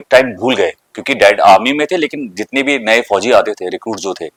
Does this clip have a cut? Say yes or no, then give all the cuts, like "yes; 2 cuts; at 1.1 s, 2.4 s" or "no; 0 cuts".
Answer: no; 0 cuts